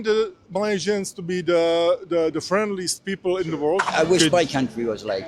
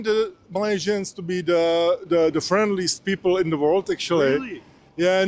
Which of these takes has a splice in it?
first; 1 cut; at 3.9 s

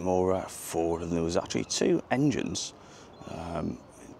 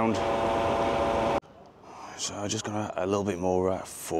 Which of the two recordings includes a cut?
second; 1 cut; at 1.4 s

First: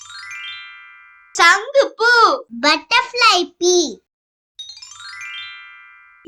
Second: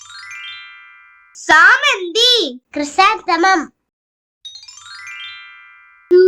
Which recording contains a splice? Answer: second; 1 cut; at 1.2 s

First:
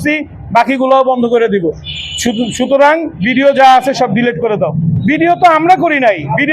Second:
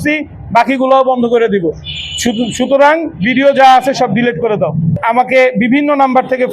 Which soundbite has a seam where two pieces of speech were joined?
second; 1 cut; at 4.9 s

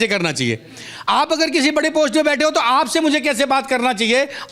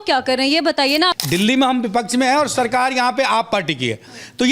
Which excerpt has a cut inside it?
second; 1 cut; at 1.1 s

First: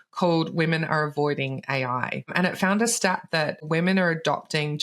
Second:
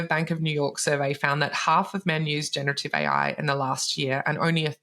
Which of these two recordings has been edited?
first; 2 cuts; at 2.3 s, 3.6 s

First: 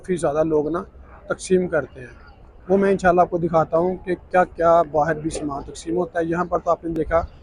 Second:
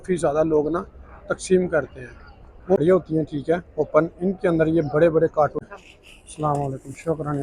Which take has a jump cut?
second; 2 cuts; at 2.8 s, 5.6 s

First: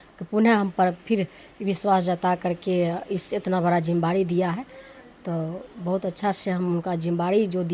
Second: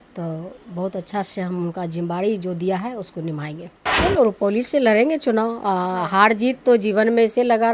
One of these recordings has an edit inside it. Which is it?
second; 1 cut; at 3.9 s

